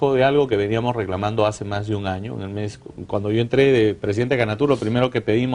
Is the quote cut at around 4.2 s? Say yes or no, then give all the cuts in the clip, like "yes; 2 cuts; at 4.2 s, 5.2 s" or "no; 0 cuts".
no; 1 cut; at 2.1 s